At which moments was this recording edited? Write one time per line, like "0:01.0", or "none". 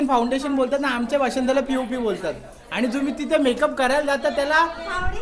none